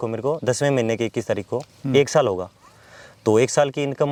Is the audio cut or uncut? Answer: uncut